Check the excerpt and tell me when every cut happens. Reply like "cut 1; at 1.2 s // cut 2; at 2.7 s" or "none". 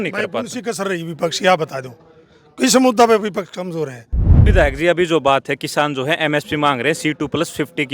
cut 1; at 4.5 s